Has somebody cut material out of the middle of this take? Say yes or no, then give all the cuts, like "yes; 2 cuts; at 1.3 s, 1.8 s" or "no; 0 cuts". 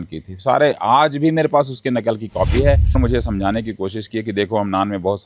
yes; 1 cut; at 3.0 s